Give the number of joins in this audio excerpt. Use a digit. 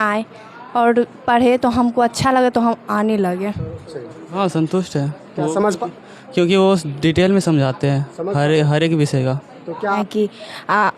2